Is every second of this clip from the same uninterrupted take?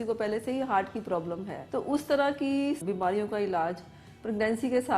no; 2 cuts; at 1.6 s, 2.8 s

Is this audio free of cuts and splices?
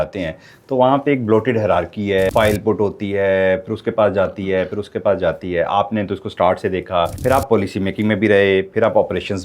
no; 2 cuts; at 2.3 s, 7.1 s

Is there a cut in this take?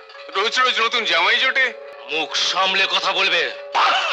yes; 1 cut; at 1.9 s

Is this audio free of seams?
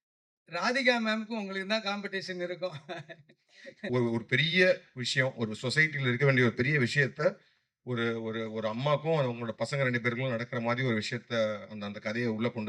no; 1 cut; at 3.9 s

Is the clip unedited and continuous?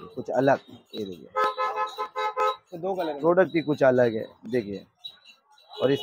yes; 0 cuts

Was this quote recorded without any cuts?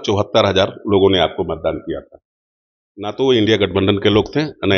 yes; 0 cuts

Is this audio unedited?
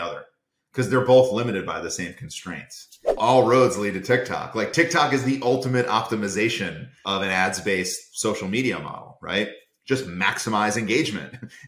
no; 2 cuts; at 3.2 s, 7.0 s

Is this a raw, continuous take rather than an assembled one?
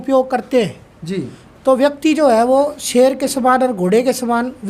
yes; 0 cuts

